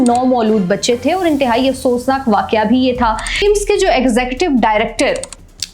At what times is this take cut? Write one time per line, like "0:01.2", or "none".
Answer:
0:03.4

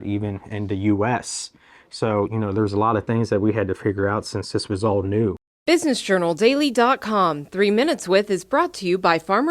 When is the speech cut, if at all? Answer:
0:05.5

